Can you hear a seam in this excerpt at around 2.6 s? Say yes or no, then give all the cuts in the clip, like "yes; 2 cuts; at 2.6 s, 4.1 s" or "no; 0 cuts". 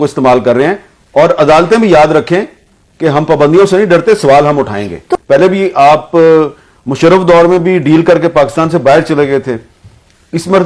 no; 1 cut; at 5.0 s